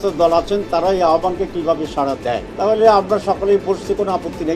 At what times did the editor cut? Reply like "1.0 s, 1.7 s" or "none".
2.5 s